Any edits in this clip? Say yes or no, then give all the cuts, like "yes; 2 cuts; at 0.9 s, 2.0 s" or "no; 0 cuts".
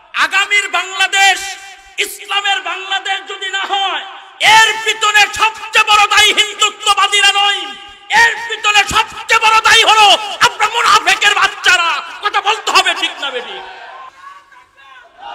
yes; 1 cut; at 14.1 s